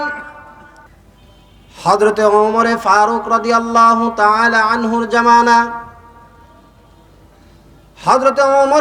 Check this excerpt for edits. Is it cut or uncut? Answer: cut